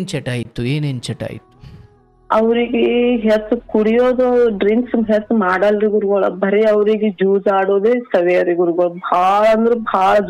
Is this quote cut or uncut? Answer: uncut